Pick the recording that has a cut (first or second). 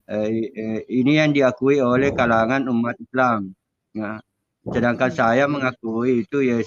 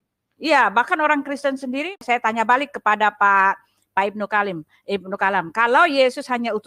second